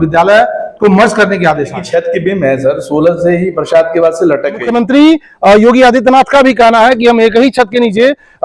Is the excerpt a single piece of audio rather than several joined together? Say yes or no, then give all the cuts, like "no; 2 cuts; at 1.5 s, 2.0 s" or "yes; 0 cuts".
no; 2 cuts; at 1.8 s, 4.7 s